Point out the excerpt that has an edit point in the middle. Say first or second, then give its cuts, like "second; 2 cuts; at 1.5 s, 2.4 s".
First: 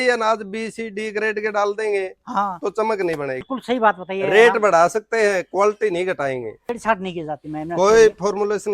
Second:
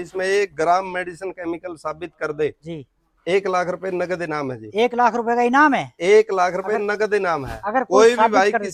first; 2 cuts; at 3.4 s, 6.7 s